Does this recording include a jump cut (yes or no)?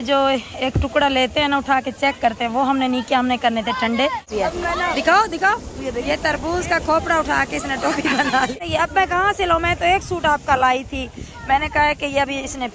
yes